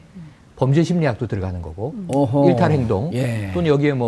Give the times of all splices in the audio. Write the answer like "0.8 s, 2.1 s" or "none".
2.3 s